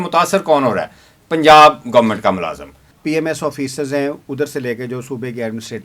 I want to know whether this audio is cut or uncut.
cut